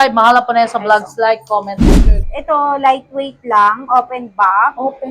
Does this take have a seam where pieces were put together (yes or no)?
yes